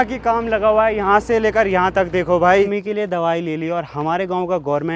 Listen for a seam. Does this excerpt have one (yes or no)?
yes